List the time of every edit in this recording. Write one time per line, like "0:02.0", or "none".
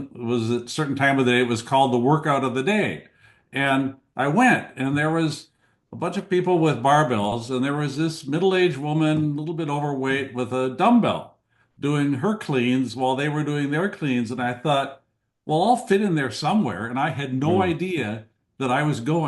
none